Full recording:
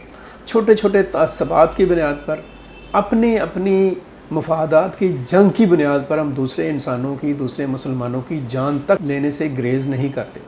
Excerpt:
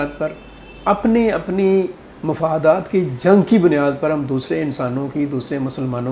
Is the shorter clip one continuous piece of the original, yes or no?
yes